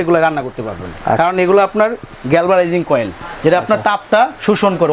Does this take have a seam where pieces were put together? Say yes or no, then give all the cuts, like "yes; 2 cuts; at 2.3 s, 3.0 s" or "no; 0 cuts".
no; 0 cuts